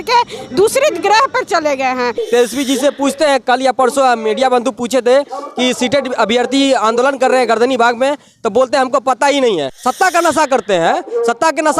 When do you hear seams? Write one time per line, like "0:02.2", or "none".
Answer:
0:02.2
0:09.8